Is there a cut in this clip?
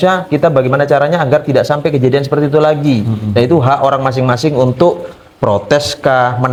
no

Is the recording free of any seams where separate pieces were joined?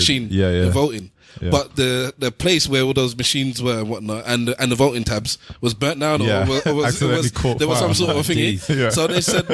no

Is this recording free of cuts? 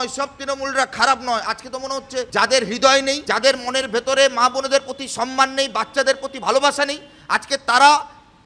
no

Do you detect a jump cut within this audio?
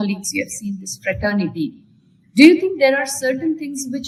no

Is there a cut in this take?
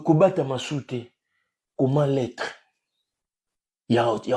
no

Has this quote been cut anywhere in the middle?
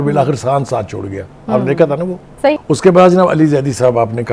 yes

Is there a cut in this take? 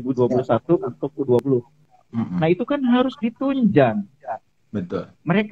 yes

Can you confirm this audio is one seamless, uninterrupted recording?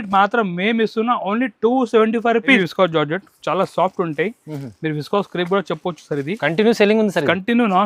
no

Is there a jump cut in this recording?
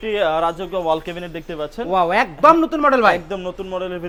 no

